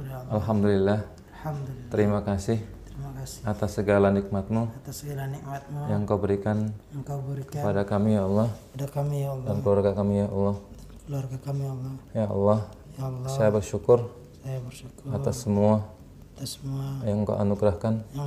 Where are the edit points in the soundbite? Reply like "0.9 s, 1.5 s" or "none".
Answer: none